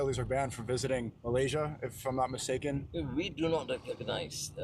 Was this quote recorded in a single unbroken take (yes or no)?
no